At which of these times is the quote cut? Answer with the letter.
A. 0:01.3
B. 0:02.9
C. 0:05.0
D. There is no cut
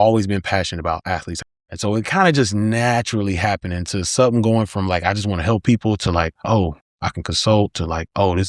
A